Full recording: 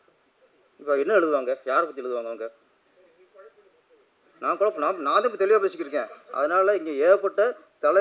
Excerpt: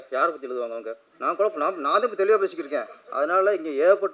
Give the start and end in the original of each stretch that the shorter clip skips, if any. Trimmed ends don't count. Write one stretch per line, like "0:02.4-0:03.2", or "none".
0:02.6-0:04.2